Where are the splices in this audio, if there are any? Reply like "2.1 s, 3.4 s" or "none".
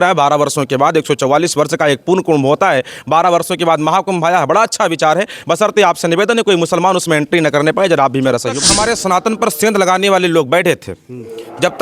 8.6 s

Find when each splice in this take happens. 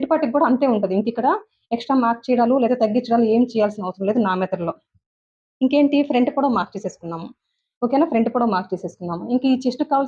none

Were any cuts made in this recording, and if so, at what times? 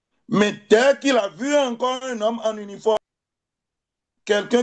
3.0 s

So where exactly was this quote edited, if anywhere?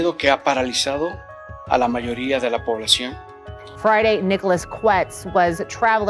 3.8 s

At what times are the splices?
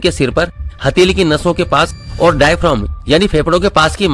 none

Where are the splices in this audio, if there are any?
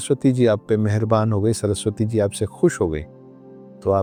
none

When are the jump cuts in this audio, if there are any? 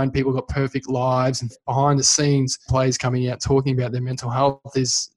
1.6 s, 2.7 s

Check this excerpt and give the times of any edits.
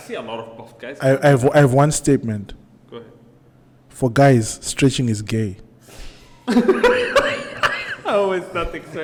none

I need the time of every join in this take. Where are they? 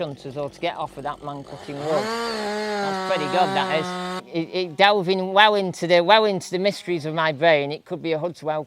4.2 s

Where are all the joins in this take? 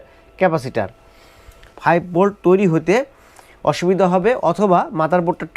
1.6 s

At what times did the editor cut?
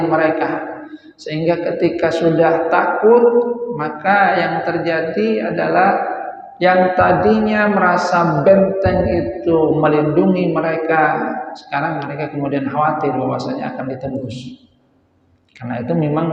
none

